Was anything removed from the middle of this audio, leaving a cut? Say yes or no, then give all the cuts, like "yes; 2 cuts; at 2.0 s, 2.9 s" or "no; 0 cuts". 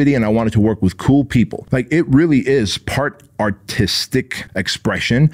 yes; 2 cuts; at 1.6 s, 4.4 s